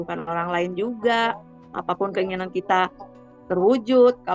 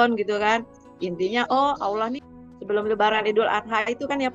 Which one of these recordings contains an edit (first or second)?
second